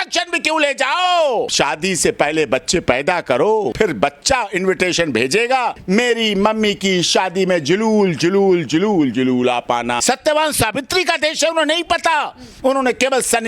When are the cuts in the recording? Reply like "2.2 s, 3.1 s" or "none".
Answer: 1.5 s, 3.7 s, 5.8 s, 10.0 s